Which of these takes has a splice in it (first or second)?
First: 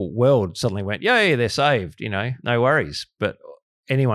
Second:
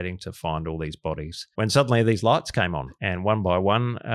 second